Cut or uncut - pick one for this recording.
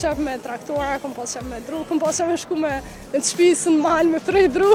uncut